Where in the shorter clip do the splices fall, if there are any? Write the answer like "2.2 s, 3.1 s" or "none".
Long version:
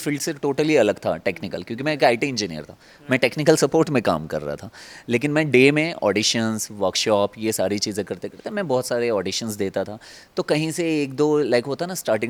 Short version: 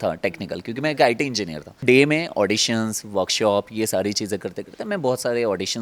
1.8 s